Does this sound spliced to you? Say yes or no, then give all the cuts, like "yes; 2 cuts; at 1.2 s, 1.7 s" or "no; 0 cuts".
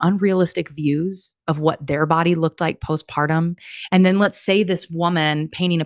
no; 0 cuts